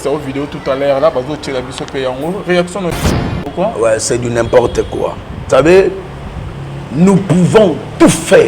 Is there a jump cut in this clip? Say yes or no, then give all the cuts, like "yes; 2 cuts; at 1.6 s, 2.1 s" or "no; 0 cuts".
yes; 1 cut; at 3.0 s